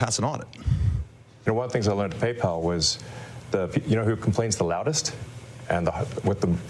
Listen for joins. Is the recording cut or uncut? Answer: cut